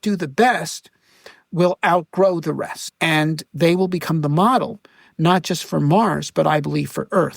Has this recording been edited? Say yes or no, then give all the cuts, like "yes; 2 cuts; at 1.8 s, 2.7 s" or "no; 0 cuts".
yes; 1 cut; at 2.9 s